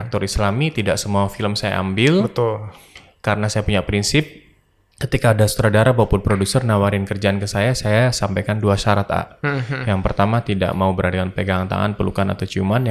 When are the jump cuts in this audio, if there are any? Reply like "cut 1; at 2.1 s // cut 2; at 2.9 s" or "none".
none